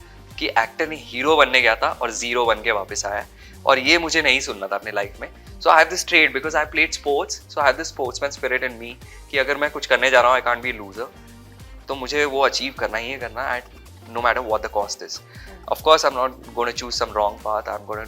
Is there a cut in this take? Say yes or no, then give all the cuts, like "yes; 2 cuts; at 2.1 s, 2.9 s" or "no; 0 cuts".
no; 0 cuts